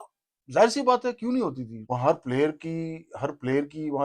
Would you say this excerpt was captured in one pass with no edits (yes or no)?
no